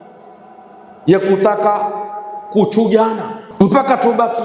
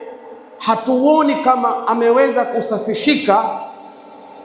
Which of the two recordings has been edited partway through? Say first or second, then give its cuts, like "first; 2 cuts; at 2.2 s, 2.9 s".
first; 1 cut; at 3.4 s